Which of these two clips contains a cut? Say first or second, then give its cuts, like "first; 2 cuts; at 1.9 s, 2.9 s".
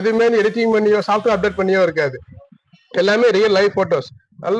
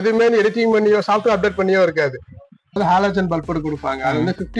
second; 1 cut; at 2.8 s